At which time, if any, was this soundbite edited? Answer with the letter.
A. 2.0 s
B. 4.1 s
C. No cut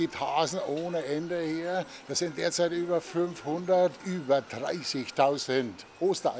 B